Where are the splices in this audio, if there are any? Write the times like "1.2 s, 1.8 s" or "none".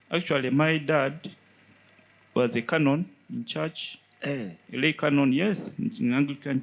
none